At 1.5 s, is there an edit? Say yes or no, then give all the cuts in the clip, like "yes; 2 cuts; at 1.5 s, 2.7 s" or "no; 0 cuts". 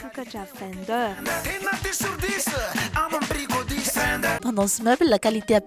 no; 1 cut; at 4.4 s